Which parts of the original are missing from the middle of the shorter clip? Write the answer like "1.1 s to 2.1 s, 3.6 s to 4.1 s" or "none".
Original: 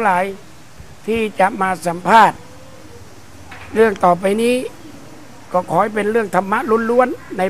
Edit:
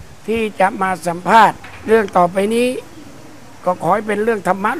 2.5 s to 3.6 s